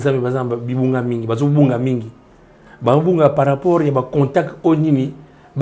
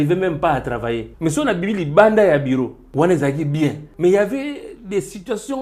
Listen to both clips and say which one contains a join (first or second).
second